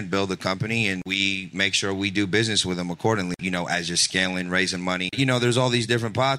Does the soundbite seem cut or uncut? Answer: cut